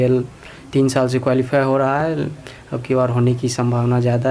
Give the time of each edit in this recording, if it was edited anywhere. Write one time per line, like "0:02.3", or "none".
none